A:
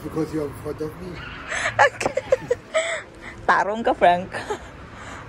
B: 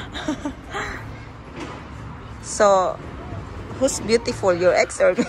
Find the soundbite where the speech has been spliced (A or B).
B